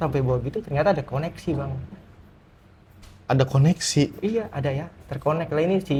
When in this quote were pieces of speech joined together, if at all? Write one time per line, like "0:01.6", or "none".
none